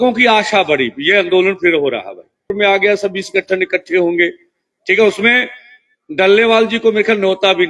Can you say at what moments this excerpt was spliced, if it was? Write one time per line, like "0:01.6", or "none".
0:02.5

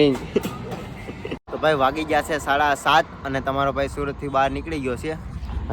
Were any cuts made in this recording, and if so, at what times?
0:01.5

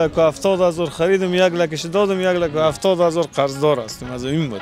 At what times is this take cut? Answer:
none

